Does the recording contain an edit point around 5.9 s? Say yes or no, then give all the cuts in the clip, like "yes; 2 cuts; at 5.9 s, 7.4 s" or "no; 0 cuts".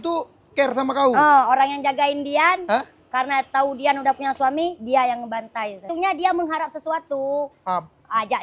yes; 1 cut; at 5.9 s